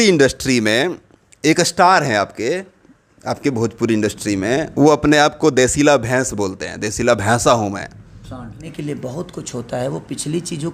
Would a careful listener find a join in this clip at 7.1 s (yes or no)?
no